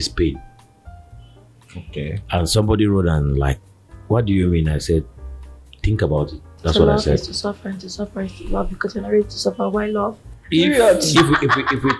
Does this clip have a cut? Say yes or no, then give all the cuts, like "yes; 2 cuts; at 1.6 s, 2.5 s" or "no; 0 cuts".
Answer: no; 0 cuts